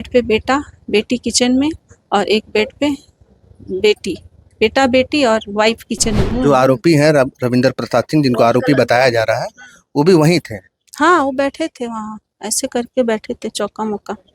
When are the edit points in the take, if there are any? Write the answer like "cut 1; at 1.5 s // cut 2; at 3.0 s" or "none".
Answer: cut 1; at 6.3 s